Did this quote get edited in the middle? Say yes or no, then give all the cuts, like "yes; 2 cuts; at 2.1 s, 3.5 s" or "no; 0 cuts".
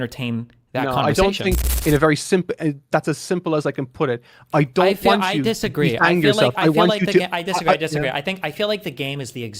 yes; 1 cut; at 1.7 s